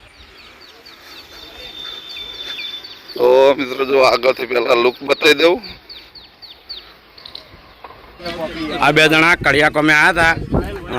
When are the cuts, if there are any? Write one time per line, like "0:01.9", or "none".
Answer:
0:08.3